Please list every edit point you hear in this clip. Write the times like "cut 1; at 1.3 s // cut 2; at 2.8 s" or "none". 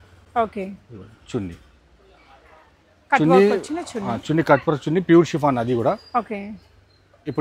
none